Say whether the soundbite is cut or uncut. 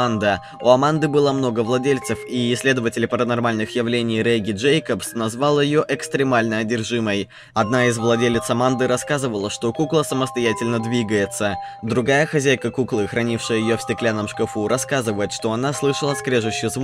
cut